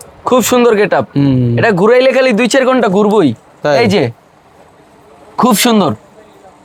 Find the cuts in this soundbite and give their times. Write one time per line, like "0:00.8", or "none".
none